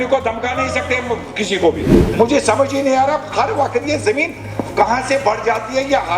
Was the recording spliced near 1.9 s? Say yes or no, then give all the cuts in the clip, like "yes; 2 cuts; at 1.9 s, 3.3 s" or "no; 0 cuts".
yes; 1 cut; at 1.9 s